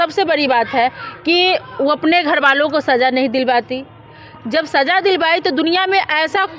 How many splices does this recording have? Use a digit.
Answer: 0